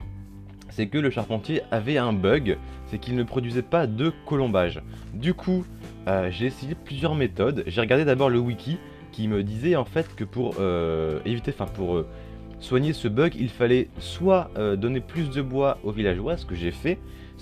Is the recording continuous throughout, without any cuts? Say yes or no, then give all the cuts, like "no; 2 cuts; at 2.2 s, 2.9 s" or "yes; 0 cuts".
no; 1 cut; at 9.4 s